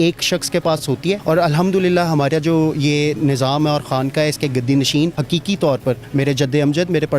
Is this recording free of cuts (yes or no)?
no